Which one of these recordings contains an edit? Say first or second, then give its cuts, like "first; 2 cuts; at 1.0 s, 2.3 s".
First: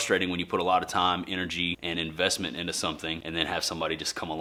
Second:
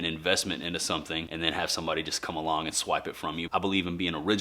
second; 1 cut; at 3.4 s